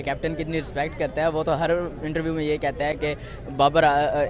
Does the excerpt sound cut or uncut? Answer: uncut